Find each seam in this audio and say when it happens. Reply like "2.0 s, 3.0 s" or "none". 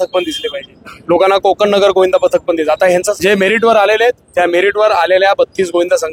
3.1 s